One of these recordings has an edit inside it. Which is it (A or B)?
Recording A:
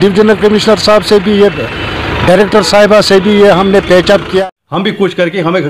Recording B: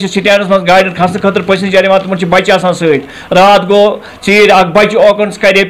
A